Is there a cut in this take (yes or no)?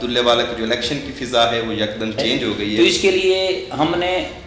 yes